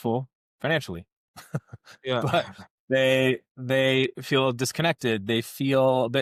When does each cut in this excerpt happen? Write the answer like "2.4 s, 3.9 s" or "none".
none